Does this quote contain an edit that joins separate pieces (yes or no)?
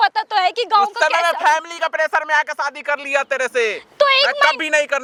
no